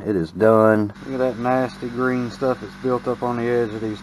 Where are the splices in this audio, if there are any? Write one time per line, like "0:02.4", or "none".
0:01.0